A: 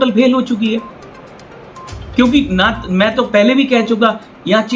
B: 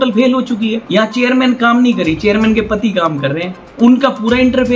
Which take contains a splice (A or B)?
B